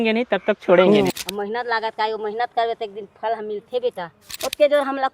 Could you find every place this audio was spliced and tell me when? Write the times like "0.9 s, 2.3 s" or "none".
1.1 s, 4.2 s